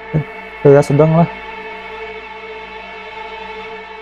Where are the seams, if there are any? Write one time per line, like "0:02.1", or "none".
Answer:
0:01.3